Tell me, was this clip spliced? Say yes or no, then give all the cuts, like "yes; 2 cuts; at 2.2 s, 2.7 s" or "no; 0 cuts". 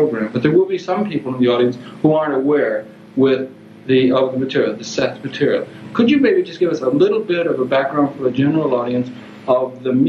yes; 1 cut; at 4.3 s